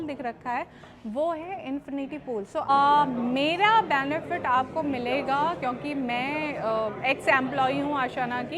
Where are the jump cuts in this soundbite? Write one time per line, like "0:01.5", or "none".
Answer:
0:02.7